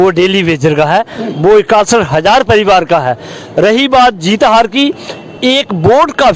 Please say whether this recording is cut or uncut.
uncut